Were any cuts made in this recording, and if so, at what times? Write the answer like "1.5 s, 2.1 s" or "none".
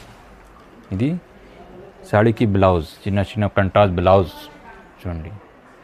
none